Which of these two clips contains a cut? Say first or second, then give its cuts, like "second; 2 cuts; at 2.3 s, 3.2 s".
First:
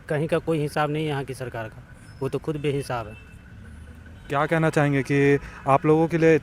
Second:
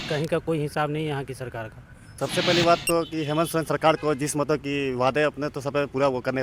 second; 1 cut; at 2.1 s